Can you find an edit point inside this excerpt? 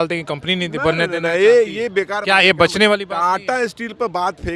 no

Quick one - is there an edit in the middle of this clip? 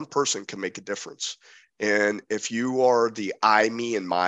no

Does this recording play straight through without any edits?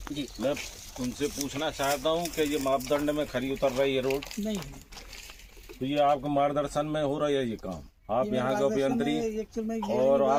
yes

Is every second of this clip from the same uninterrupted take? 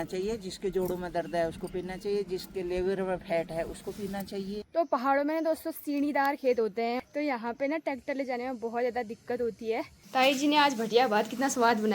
no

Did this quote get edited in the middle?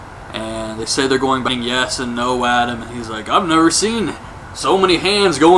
no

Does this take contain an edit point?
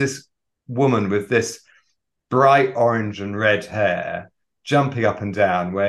no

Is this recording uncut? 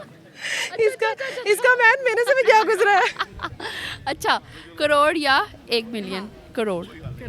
yes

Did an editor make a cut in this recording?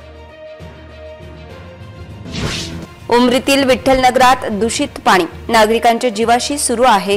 yes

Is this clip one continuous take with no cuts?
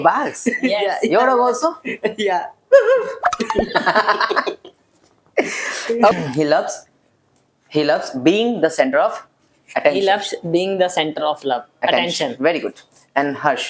no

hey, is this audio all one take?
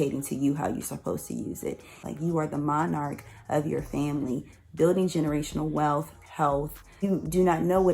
no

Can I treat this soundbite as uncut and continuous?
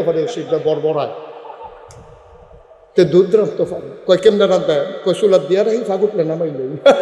yes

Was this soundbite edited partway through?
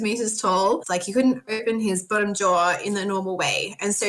yes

